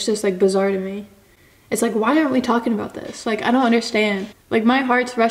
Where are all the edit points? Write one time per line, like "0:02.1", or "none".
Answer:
0:04.3